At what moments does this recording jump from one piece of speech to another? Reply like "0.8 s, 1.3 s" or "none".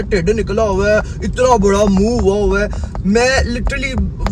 none